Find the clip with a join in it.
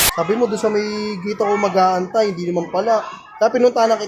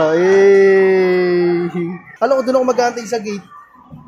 second; 1 cut; at 2.0 s

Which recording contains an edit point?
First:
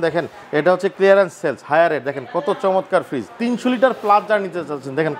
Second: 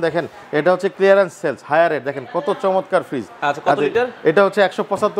first; 1 cut; at 3.3 s

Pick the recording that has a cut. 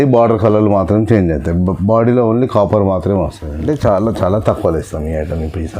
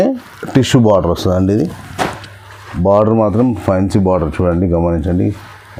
first; 1 cut; at 3.7 s

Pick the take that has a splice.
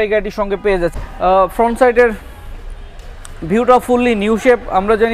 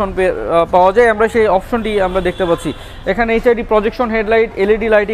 first; 1 cut; at 1.0 s

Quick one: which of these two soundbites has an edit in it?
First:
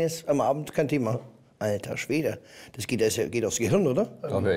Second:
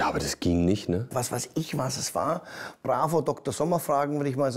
second; 1 cut; at 1.1 s

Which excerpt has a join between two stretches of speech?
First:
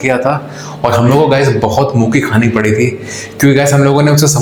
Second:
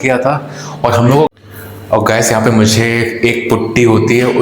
second; 1 cut; at 1.3 s

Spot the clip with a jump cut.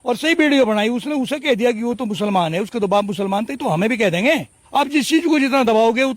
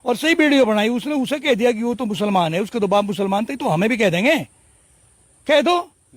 first; 1 cut; at 4.5 s

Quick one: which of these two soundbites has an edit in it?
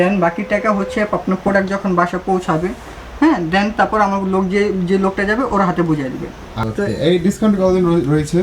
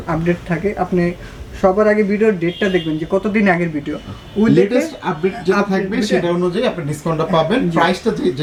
first; 1 cut; at 6.5 s

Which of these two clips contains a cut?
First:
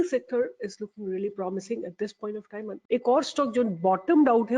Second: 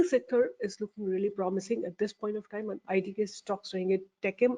first; 1 cut; at 2.7 s

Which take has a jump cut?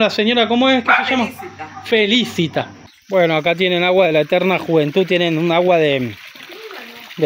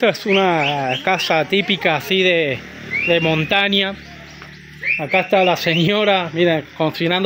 first; 1 cut; at 2.8 s

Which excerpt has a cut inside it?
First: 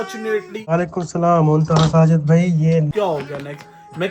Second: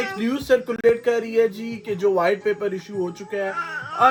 first; 2 cuts; at 0.7 s, 2.9 s

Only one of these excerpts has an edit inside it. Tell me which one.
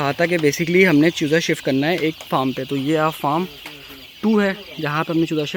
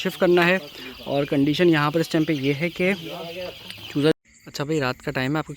second; 1 cut; at 4.1 s

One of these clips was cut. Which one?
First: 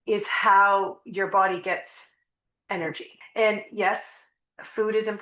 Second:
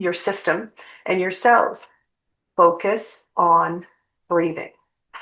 first; 1 cut; at 3.1 s

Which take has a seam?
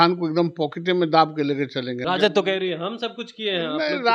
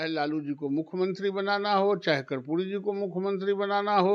first; 1 cut; at 2.0 s

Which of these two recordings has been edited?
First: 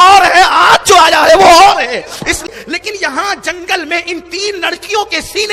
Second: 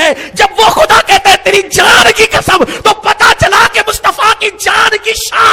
first; 1 cut; at 2.5 s

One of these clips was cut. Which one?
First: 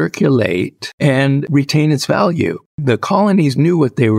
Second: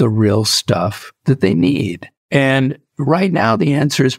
first; 2 cuts; at 1.2 s, 2.7 s

